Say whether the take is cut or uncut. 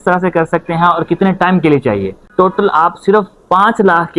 cut